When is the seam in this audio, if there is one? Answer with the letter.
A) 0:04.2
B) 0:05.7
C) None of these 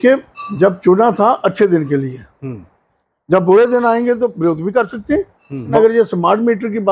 B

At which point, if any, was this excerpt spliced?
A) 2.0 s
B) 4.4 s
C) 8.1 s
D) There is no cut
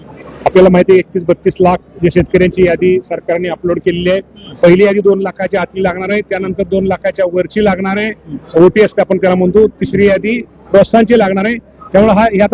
B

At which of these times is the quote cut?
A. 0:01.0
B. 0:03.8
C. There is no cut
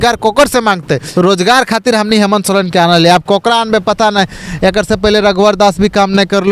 A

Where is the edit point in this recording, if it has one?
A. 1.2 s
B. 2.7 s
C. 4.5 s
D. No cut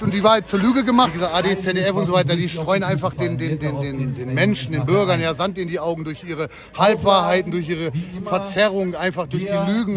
A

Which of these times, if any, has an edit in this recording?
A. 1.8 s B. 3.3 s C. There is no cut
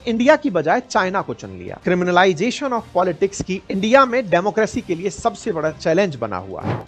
A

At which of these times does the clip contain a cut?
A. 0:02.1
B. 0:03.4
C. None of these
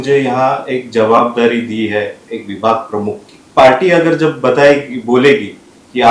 B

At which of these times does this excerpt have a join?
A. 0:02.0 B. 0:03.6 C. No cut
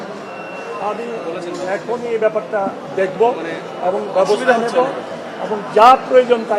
C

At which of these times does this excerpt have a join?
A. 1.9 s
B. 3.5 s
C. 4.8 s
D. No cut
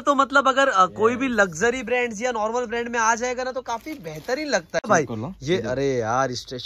C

